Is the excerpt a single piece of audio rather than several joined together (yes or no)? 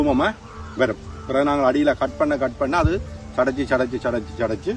yes